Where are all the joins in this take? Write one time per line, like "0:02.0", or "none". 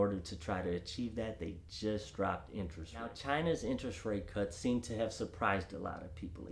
0:03.2